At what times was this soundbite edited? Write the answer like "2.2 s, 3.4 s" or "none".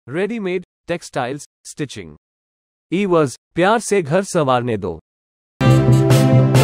5.5 s